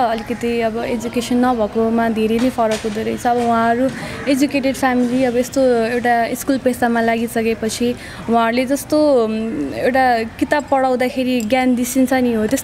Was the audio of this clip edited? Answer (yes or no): no